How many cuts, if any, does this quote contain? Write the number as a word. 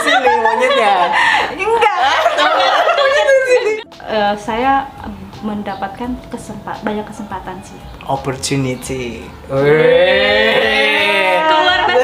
one